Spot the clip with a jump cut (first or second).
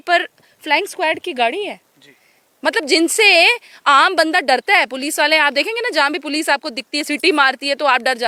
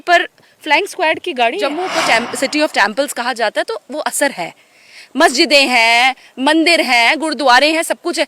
second